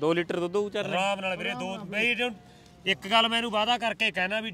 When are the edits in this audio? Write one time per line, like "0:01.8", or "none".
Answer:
none